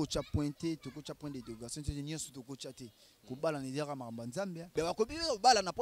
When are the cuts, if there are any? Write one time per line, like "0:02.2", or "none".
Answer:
0:04.6